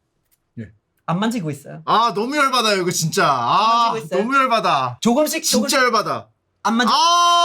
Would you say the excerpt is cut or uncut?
cut